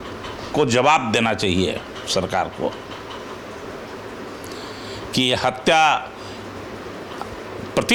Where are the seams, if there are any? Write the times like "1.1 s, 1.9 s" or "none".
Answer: none